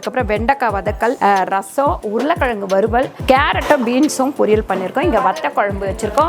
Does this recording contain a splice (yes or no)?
yes